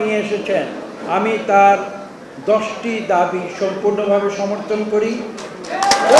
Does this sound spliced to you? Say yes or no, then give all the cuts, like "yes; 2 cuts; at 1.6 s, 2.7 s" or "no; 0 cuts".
no; 0 cuts